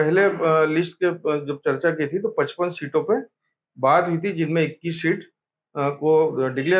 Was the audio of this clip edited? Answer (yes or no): no